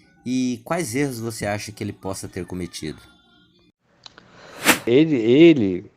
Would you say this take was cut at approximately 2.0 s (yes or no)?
no